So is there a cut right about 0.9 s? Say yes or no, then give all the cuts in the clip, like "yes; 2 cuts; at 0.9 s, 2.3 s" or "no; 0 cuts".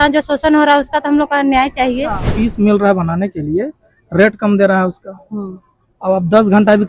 no; 1 cut; at 2.3 s